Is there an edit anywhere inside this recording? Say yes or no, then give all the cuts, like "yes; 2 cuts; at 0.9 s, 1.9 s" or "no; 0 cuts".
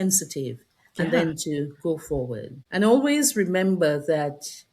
yes; 1 cut; at 2.5 s